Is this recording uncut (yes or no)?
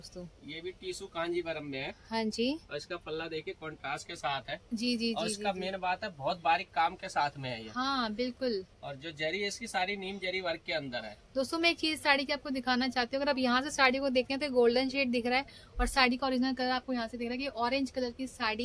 yes